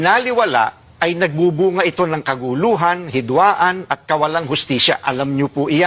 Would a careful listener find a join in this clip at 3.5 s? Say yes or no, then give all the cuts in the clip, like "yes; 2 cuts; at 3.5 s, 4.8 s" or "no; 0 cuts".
no; 0 cuts